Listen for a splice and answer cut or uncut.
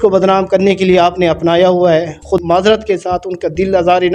cut